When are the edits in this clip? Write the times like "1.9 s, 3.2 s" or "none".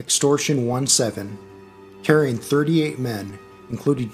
2.3 s